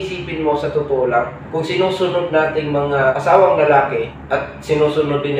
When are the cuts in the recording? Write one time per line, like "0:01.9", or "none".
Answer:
0:01.4
0:03.1
0:04.1